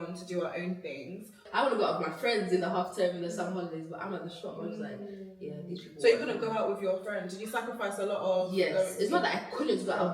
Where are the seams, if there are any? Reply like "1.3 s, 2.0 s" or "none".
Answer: 1.4 s